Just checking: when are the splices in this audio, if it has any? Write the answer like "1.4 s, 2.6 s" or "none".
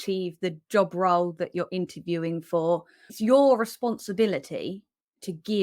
3.0 s